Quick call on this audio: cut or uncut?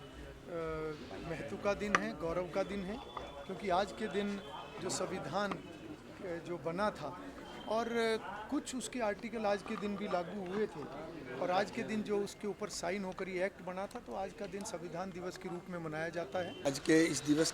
cut